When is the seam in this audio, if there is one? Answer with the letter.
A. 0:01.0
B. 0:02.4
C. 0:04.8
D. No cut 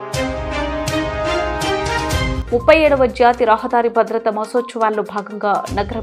D